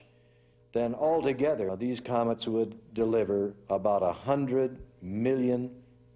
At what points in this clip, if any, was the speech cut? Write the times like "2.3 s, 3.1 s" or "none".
1.7 s